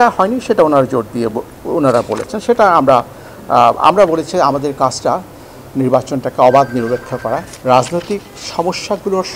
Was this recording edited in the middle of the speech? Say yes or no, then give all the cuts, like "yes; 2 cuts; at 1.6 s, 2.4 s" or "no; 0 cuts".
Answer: yes; 1 cut; at 7.5 s